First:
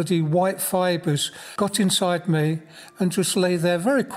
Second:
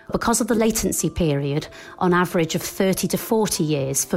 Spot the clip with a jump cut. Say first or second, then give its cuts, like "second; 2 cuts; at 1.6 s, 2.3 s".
first; 1 cut; at 1.4 s